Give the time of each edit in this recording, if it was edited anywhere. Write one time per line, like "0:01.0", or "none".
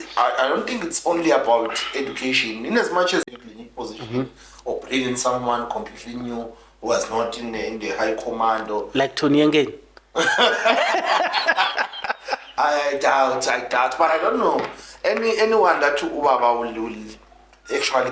0:03.3